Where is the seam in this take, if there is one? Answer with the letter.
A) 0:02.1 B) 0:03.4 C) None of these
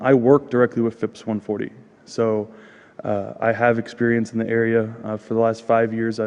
B